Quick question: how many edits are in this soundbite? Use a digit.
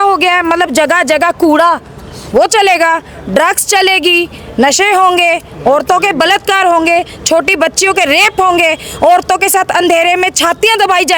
0